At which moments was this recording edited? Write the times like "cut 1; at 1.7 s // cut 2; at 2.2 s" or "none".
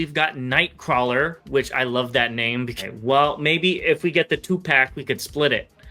cut 1; at 2.8 s